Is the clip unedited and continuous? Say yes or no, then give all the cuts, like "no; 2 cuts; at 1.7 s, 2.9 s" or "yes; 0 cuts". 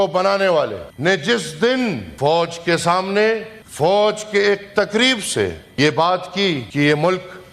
no; 5 cuts; at 0.9 s, 2.1 s, 3.6 s, 5.6 s, 6.7 s